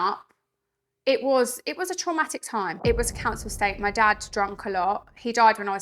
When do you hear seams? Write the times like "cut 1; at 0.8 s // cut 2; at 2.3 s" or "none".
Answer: cut 1; at 2.7 s

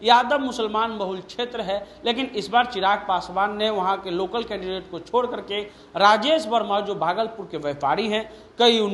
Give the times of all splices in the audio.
none

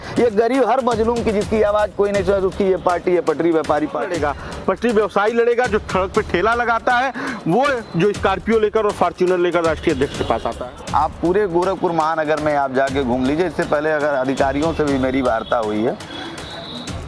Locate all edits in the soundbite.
cut 1; at 4.1 s // cut 2; at 10.5 s

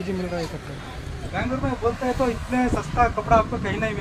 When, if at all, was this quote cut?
cut 1; at 1.2 s

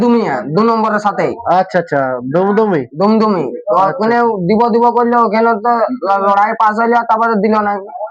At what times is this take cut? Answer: none

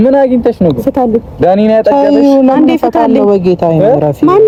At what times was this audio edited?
none

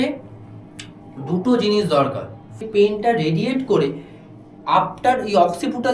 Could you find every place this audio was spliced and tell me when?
cut 1; at 2.6 s

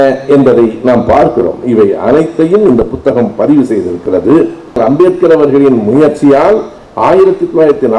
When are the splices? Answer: cut 1; at 4.8 s

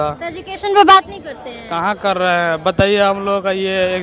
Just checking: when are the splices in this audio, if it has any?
none

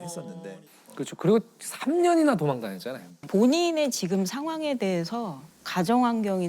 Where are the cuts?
cut 1; at 3.2 s

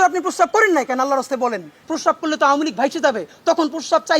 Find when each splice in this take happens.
cut 1; at 1.8 s

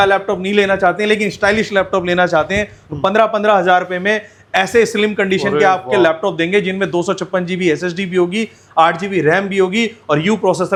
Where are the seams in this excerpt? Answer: none

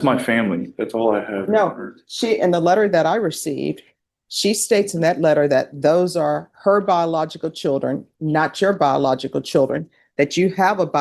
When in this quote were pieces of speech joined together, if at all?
none

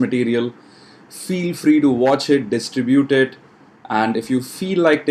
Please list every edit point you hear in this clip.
none

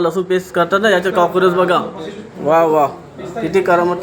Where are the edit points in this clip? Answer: none

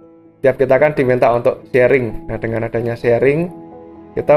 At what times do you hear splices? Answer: none

